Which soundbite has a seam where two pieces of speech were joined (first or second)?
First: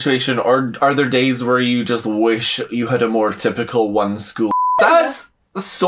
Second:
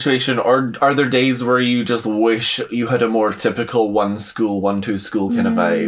first